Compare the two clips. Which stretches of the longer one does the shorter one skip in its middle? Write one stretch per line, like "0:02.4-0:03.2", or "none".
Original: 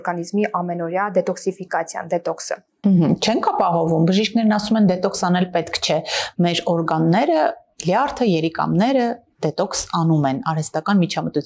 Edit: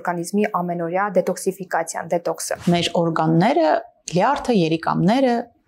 0:02.6-0:06.3